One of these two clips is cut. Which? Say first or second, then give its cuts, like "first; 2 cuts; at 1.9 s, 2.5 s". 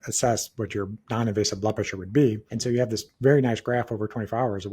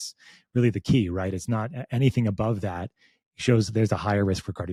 first; 2 cuts; at 1.0 s, 2.5 s